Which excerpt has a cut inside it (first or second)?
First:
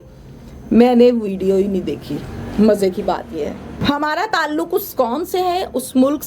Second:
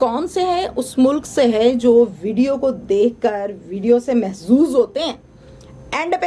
first